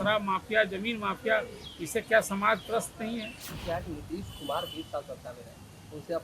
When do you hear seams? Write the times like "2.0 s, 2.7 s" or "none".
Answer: 3.6 s